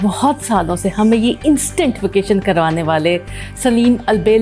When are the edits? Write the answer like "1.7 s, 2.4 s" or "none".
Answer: none